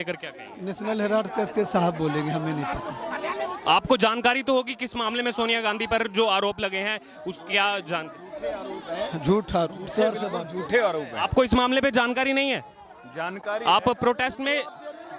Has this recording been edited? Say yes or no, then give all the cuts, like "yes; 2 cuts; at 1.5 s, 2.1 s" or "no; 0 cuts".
no; 0 cuts